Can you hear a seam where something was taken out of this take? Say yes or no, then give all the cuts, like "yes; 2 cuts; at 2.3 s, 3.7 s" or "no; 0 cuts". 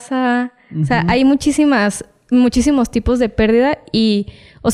no; 0 cuts